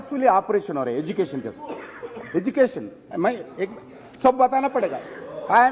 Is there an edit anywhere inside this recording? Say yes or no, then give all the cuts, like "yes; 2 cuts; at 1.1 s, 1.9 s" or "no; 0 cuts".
no; 0 cuts